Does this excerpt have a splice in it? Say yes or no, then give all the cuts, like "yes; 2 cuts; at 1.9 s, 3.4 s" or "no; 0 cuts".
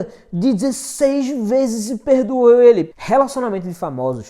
yes; 1 cut; at 2.9 s